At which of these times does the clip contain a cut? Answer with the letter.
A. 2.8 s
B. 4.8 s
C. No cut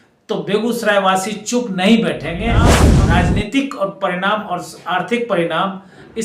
A